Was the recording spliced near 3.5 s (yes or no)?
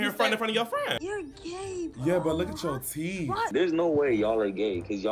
yes